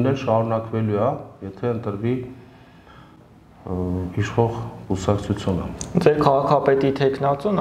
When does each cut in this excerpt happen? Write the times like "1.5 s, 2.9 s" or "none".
none